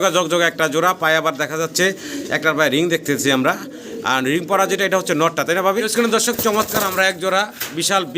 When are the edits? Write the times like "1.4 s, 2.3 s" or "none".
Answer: 5.9 s

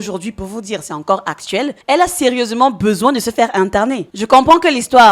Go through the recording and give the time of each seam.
1.8 s

